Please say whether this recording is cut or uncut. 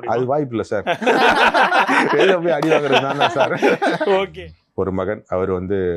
cut